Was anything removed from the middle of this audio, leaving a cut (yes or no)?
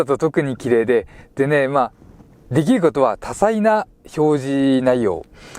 no